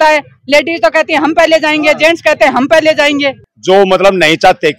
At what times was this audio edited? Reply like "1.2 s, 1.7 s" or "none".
3.6 s

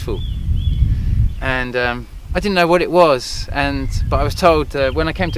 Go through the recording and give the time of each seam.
none

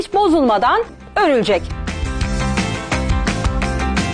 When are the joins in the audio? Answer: 1.0 s, 1.8 s

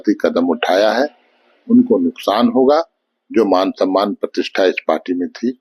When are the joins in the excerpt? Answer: none

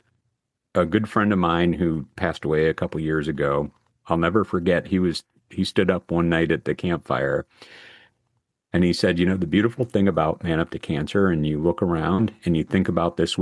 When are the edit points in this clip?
none

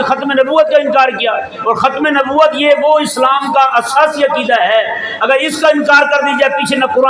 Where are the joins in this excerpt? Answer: none

